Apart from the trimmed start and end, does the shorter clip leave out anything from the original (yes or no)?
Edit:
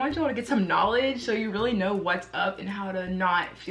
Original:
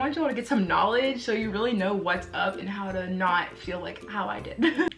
no